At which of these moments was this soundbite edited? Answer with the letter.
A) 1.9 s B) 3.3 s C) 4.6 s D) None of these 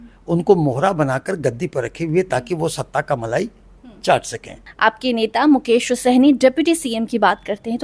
C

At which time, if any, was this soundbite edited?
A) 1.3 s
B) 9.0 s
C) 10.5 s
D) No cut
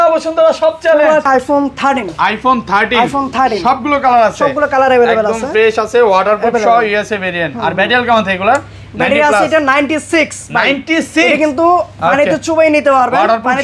A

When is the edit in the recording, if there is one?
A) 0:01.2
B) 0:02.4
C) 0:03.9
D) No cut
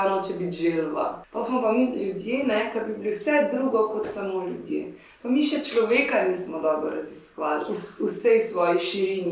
A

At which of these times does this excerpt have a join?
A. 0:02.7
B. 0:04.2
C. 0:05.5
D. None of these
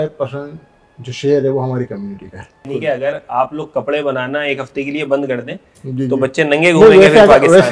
A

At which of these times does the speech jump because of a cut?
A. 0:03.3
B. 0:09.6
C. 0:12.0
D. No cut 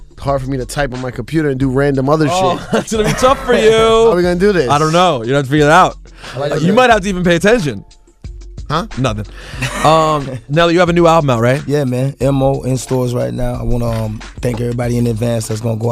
A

